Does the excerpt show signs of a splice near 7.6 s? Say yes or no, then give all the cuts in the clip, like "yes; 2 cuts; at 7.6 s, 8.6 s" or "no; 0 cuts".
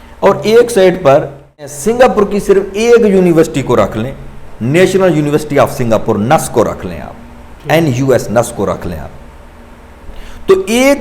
no; 1 cut; at 1.8 s